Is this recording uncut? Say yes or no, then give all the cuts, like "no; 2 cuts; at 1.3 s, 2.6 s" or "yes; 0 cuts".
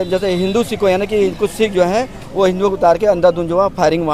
yes; 0 cuts